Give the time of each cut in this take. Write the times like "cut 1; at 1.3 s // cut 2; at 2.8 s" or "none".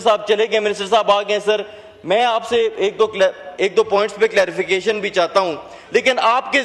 none